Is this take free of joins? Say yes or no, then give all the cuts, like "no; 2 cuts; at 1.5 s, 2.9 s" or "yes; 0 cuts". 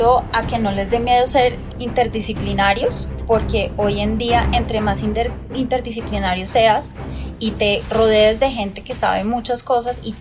no; 1 cut; at 1.6 s